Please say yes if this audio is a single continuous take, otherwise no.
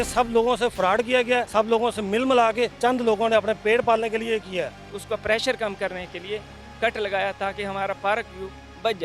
no